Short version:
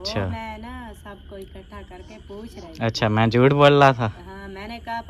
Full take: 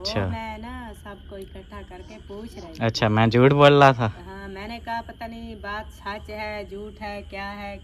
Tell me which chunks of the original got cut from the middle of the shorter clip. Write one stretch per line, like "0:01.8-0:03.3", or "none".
none